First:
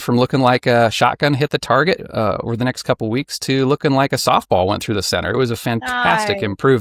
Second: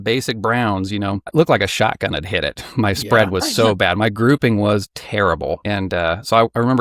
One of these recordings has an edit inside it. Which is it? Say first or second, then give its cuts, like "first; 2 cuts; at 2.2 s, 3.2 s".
second; 2 cuts; at 1.3 s, 5.6 s